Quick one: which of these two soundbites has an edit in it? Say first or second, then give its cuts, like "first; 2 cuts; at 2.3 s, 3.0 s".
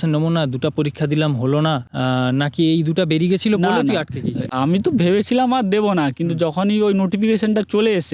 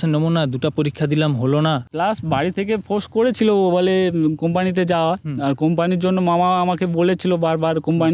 second; 1 cut; at 1.9 s